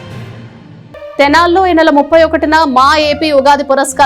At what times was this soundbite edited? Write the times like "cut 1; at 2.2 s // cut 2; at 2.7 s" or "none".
none